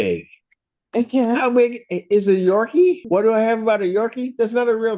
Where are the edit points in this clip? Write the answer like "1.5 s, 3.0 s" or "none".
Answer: 3.0 s